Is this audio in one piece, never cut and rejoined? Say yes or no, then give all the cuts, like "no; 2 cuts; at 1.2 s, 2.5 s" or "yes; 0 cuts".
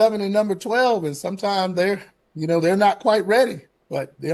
yes; 0 cuts